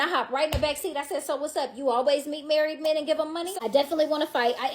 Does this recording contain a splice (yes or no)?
yes